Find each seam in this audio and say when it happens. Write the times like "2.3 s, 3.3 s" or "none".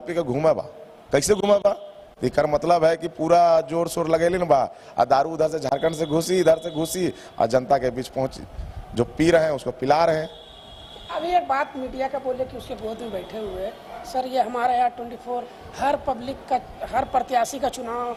none